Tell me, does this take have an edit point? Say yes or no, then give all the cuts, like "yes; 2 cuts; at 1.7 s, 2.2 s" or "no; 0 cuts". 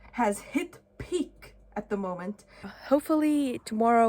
yes; 1 cut; at 2.7 s